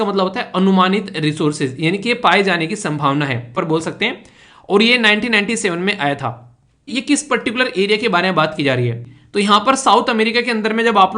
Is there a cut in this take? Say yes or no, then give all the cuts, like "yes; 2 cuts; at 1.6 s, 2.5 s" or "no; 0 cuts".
yes; 3 cuts; at 3.5 s, 6.9 s, 9.1 s